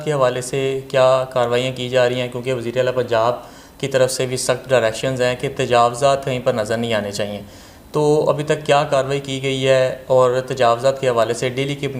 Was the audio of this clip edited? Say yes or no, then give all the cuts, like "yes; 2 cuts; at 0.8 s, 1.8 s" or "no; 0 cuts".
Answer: no; 0 cuts